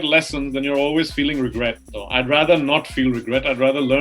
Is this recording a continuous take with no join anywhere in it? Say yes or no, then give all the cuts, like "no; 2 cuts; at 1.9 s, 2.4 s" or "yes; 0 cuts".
no; 1 cut; at 1.9 s